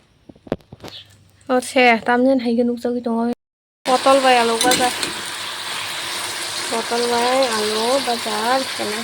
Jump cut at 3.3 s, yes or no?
yes